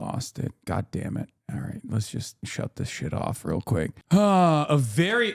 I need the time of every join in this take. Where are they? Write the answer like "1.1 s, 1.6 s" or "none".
2.5 s